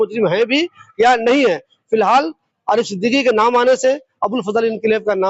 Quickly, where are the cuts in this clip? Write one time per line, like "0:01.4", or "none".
none

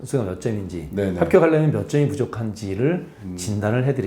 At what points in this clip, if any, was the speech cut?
none

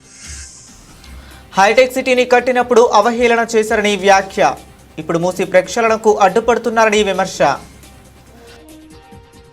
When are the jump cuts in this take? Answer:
none

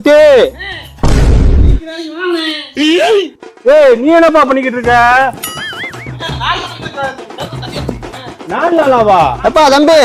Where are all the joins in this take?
none

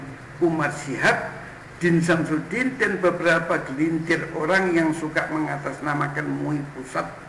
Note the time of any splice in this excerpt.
none

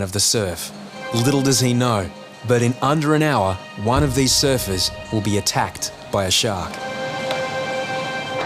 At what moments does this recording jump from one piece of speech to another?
0:01.0
0:03.7
0:05.0
0:06.8

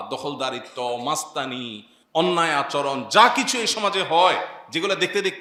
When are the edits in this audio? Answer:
none

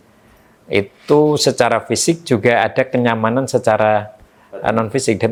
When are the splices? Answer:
none

